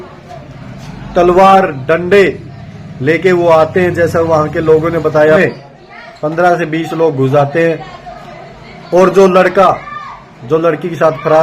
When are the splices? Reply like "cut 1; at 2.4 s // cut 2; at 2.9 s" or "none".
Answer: cut 1; at 5.4 s